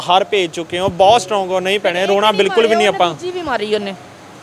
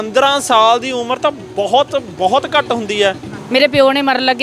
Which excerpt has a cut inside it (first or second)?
second